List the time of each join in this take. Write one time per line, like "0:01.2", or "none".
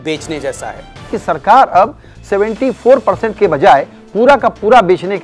0:01.1